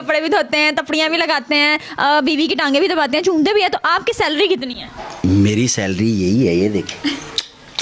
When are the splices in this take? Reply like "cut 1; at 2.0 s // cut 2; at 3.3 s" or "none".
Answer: none